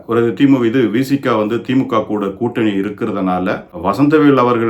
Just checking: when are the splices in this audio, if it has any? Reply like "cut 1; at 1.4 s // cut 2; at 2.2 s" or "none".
cut 1; at 3.7 s